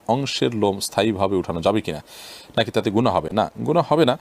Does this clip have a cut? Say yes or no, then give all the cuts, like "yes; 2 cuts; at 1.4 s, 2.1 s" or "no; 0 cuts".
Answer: no; 0 cuts